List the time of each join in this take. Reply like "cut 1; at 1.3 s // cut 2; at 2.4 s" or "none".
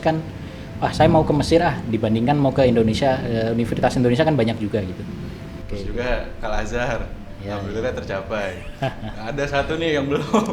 cut 1; at 5.6 s